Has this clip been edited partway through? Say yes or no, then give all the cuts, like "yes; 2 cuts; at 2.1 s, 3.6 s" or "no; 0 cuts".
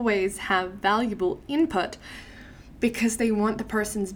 no; 0 cuts